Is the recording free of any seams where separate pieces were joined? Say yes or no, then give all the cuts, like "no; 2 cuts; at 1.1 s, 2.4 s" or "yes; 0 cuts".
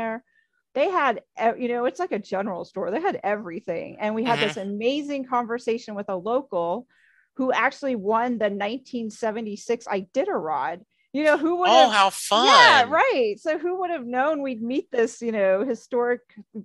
yes; 0 cuts